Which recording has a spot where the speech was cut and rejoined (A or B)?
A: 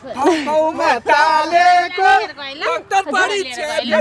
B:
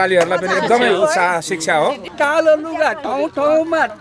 B